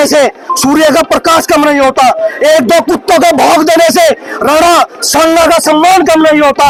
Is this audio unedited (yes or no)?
yes